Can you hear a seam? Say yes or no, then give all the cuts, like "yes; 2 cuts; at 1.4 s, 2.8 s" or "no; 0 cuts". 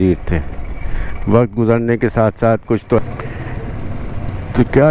yes; 1 cut; at 3.0 s